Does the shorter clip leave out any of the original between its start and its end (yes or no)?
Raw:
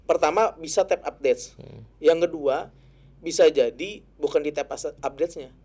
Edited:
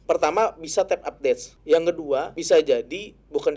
yes